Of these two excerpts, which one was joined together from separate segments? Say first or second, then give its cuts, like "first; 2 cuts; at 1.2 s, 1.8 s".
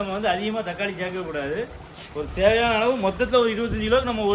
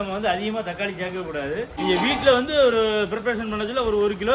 second; 1 cut; at 1.7 s